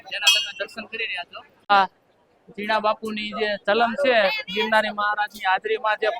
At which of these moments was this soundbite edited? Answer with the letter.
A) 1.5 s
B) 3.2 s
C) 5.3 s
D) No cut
A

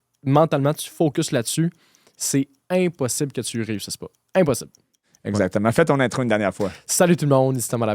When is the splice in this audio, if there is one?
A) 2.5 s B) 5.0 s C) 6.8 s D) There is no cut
B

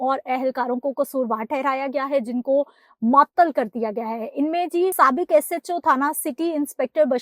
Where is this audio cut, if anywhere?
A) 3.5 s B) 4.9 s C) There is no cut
B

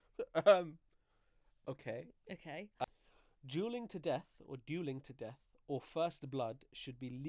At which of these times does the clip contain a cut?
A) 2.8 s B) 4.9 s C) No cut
A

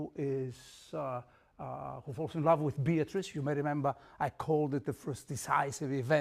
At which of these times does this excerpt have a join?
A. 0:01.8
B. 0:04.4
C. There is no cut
B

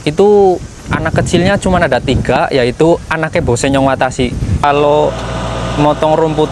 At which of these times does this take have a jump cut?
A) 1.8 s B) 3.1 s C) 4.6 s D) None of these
C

